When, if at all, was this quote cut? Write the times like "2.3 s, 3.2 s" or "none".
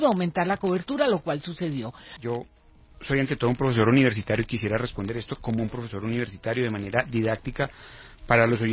2.1 s